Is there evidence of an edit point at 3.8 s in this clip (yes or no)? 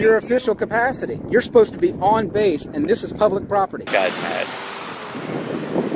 yes